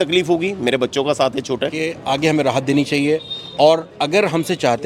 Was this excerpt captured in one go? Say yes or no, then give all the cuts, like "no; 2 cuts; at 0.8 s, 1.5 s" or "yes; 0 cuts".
no; 1 cut; at 1.9 s